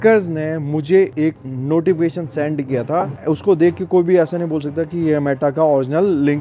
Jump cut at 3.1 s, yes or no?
yes